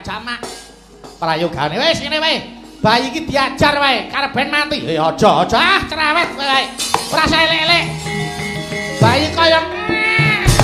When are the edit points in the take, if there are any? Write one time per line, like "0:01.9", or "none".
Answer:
none